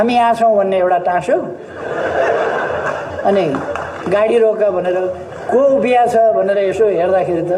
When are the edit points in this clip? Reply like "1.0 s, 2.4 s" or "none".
none

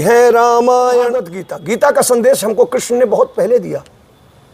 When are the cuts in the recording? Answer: 1.4 s

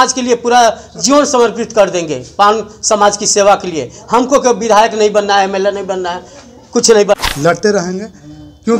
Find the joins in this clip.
7.2 s

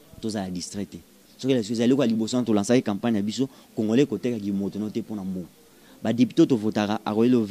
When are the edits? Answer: none

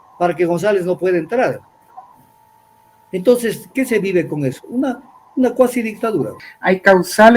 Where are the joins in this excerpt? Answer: 6.5 s

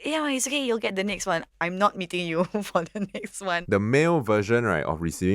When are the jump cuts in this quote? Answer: 3.6 s

